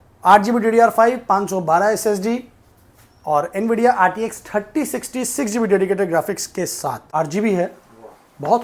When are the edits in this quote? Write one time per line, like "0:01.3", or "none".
0:07.1